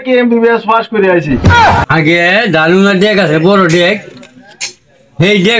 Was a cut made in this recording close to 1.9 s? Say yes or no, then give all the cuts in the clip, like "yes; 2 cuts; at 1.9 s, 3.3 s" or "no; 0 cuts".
yes; 1 cut; at 1.9 s